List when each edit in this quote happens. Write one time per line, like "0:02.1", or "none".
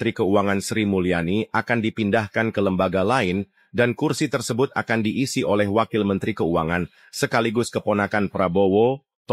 none